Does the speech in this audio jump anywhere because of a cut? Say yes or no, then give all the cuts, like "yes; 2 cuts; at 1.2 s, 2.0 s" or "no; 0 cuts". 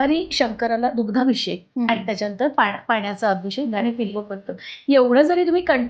no; 0 cuts